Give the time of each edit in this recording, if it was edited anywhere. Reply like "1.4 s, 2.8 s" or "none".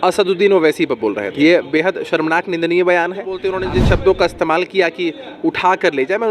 3.5 s